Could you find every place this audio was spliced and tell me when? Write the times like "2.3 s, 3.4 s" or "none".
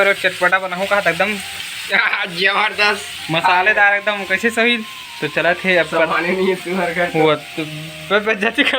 5.0 s